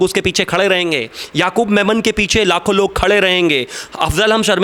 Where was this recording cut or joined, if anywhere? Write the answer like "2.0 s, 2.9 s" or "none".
none